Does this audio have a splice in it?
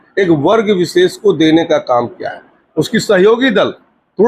no; 0 cuts

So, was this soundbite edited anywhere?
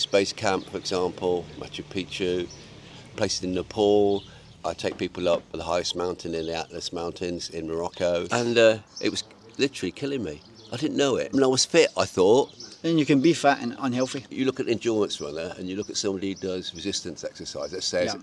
yes; 6 cuts; at 3.1 s, 4.4 s, 5.6 s, 8.3 s, 11.3 s, 14.2 s

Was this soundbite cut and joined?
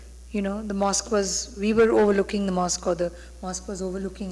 no; 0 cuts

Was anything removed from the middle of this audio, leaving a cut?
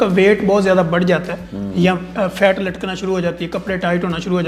no; 0 cuts

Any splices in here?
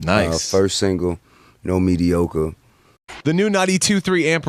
no; 0 cuts

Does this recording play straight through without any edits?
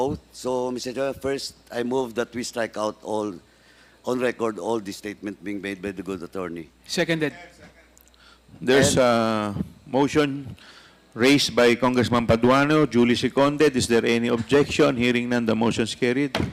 yes; 0 cuts

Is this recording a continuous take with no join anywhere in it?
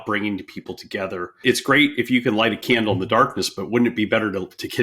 no; 1 cut; at 1.4 s

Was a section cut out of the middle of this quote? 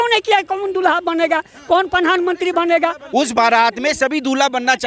yes; 1 cut; at 3.0 s

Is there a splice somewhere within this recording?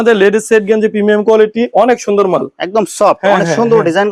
no; 0 cuts

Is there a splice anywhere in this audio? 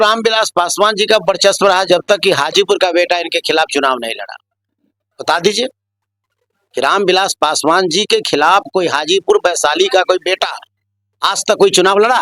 no; 0 cuts

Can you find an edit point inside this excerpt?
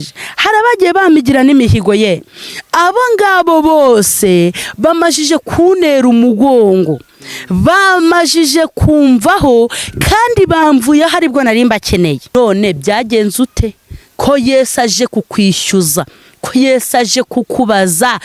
yes; 1 cut; at 12.3 s

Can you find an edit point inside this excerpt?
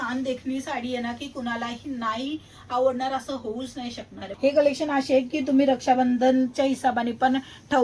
yes; 1 cut; at 4.3 s

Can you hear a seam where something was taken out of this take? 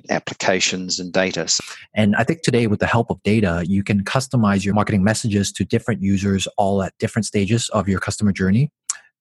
yes; 2 cuts; at 1.5 s, 4.7 s

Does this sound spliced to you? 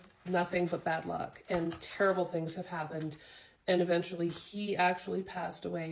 no; 0 cuts

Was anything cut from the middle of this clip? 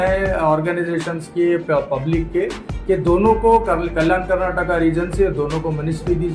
no; 0 cuts

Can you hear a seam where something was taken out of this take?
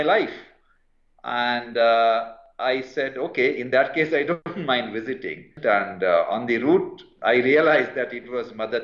yes; 2 cuts; at 4.5 s, 5.5 s

